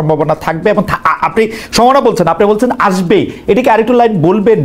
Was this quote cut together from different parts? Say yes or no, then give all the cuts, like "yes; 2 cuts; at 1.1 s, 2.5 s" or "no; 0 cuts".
no; 0 cuts